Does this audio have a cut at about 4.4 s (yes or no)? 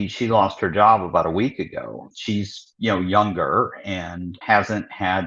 yes